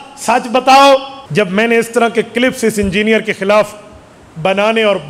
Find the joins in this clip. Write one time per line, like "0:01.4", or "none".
0:01.2